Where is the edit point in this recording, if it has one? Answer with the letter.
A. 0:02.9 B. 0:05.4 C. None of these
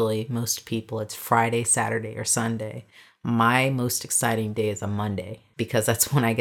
B